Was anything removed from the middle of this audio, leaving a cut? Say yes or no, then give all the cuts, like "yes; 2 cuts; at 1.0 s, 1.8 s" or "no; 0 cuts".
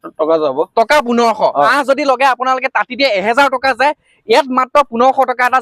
yes; 1 cut; at 1.7 s